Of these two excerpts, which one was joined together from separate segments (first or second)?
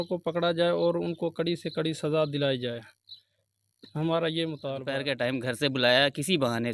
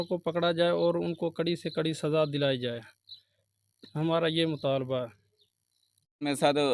first